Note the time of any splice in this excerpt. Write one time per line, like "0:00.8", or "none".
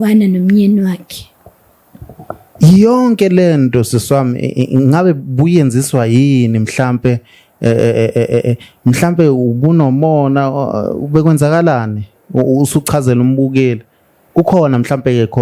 none